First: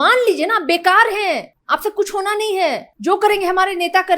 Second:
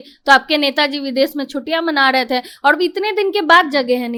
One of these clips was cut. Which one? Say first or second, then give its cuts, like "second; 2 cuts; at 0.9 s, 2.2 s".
first; 2 cuts; at 1.5 s, 2.9 s